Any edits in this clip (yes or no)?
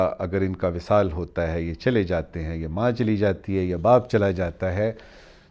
no